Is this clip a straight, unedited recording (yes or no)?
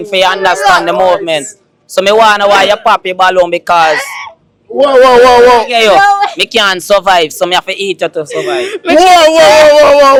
yes